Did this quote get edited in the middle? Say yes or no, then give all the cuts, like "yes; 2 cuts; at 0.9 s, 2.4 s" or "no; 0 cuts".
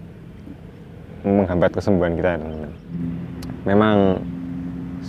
yes; 1 cut; at 3.0 s